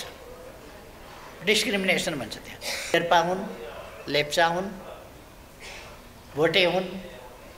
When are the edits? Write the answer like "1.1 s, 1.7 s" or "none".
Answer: 2.9 s